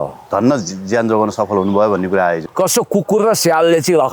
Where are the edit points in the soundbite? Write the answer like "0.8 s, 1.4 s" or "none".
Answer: 2.5 s